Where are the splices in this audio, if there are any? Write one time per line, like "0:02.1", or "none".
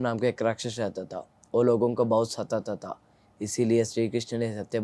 none